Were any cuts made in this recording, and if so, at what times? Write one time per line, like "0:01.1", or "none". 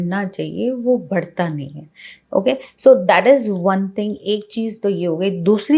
none